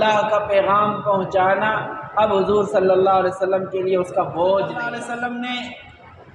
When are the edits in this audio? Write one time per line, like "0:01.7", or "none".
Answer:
0:04.9